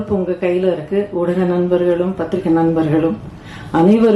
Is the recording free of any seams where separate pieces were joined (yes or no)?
yes